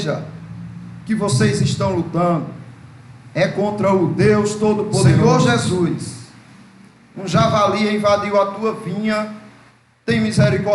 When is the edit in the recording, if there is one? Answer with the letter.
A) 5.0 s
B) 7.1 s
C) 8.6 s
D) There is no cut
A